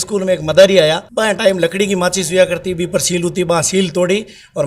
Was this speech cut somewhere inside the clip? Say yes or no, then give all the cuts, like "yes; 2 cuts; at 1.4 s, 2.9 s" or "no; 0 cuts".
yes; 1 cut; at 1.1 s